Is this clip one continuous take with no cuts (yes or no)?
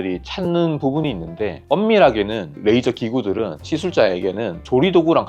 yes